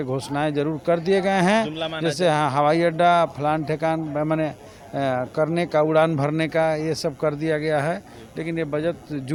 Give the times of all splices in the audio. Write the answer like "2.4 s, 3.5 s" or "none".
none